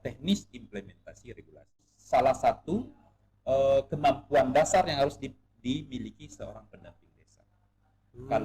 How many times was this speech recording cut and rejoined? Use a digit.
1